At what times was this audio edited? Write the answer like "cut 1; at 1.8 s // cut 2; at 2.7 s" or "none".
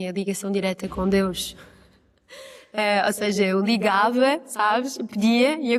none